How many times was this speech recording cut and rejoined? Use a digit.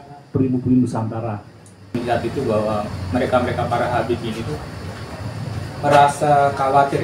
1